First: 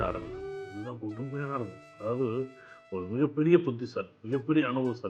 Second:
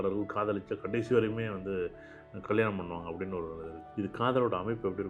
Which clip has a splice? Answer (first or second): second